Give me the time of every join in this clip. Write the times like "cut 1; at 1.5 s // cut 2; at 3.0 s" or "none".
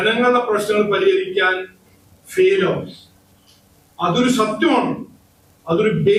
none